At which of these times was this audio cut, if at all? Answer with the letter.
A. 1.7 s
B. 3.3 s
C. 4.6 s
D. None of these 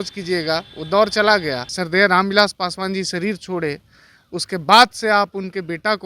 A